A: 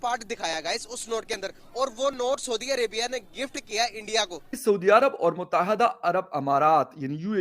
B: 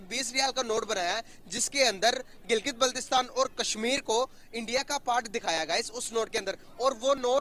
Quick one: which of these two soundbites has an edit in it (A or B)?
A